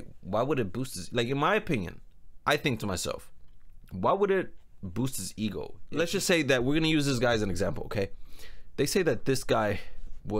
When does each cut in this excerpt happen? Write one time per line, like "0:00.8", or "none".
0:05.8